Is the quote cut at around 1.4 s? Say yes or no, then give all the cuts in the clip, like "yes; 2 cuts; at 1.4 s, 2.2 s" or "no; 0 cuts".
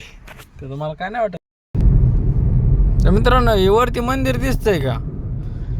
yes; 1 cut; at 1.4 s